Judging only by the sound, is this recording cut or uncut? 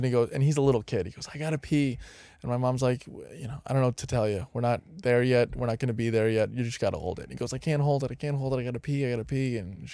uncut